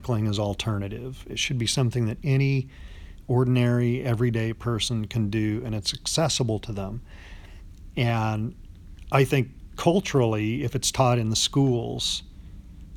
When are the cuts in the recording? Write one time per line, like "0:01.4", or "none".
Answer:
none